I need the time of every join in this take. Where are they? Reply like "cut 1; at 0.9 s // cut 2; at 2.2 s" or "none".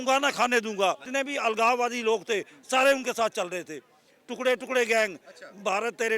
cut 1; at 1.0 s